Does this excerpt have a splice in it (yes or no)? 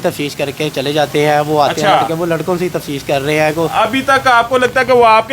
no